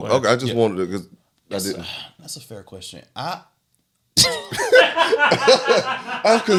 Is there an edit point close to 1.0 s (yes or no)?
no